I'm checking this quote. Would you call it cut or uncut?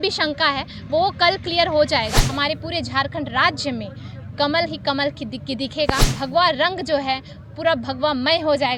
cut